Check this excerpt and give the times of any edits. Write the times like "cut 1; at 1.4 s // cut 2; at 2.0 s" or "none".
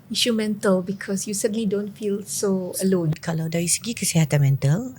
cut 1; at 3.1 s